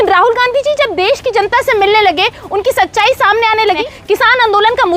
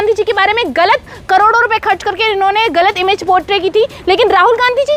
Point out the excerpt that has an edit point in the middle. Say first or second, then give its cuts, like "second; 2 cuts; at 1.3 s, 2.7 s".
first; 1 cut; at 3.8 s